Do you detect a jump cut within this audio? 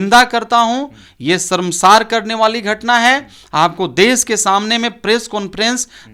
no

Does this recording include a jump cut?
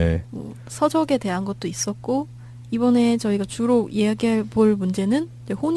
no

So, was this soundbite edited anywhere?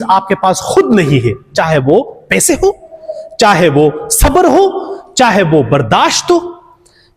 no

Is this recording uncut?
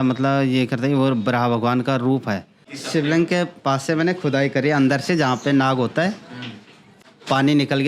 no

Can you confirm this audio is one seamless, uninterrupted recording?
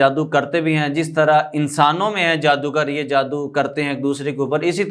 yes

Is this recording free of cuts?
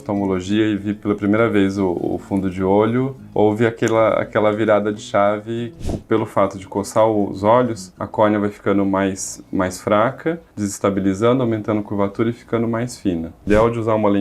no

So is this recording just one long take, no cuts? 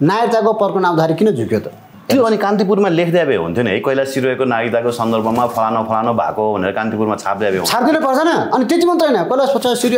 no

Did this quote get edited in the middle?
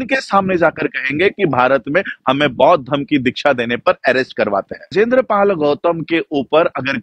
yes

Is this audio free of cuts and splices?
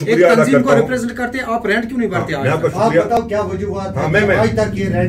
yes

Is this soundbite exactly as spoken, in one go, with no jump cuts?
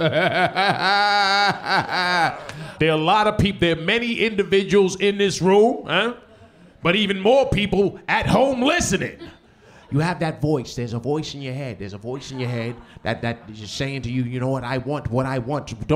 no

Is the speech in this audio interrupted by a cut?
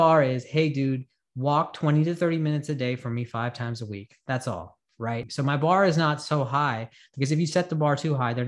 yes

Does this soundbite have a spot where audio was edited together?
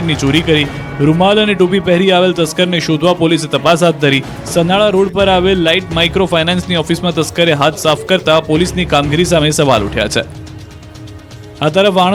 no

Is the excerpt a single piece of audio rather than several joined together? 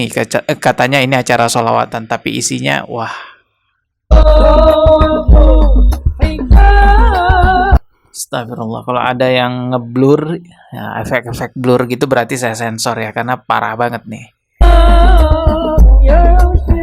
yes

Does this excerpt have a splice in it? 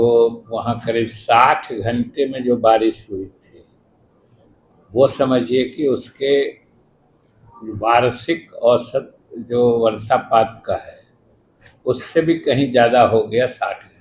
no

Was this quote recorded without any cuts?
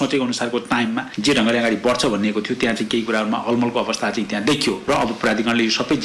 no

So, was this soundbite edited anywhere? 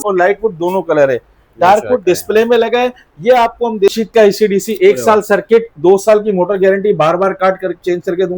yes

